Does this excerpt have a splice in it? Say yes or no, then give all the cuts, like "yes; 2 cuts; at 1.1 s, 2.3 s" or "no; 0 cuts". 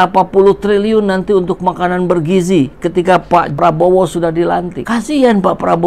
yes; 2 cuts; at 3.5 s, 4.8 s